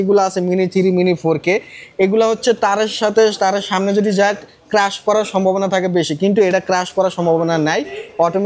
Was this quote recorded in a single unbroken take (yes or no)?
yes